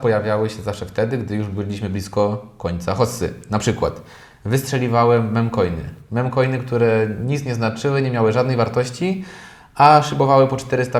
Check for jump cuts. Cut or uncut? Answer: uncut